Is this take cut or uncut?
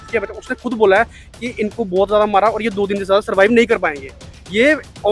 uncut